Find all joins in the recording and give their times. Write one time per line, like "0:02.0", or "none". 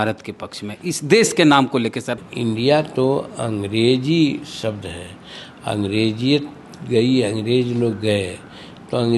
0:02.2